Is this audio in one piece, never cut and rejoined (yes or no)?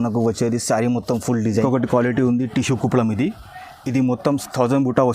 no